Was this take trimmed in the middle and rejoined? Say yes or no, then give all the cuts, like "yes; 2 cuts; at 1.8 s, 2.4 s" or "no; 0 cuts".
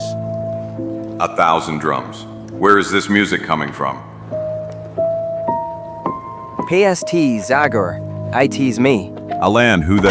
no; 0 cuts